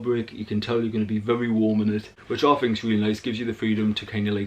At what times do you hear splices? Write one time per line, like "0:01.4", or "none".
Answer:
0:02.1